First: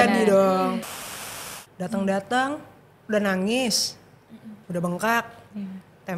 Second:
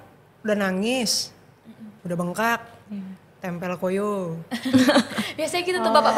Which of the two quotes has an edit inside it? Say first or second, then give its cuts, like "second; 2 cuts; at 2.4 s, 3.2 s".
first; 1 cut; at 1.1 s